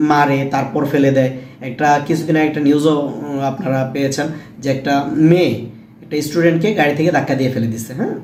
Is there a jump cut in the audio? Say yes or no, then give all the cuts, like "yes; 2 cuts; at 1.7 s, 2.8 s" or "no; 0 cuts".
no; 0 cuts